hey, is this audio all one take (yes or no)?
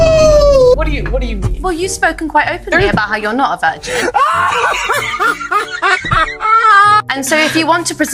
yes